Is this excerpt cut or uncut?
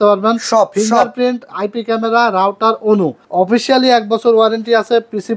cut